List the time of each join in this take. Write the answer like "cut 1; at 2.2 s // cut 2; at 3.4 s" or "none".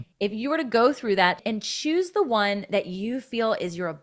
cut 1; at 1.4 s